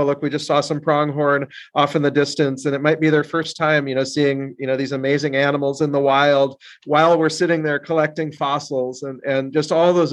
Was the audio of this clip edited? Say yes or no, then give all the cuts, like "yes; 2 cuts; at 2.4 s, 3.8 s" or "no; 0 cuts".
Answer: no; 0 cuts